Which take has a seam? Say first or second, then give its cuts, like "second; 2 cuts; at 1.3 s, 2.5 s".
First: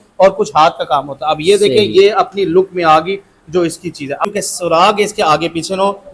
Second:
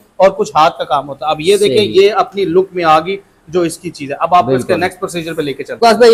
first; 1 cut; at 4.2 s